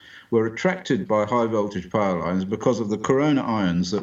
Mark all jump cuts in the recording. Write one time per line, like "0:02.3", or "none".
none